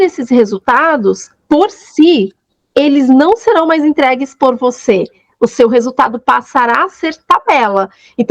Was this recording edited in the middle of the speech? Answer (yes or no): no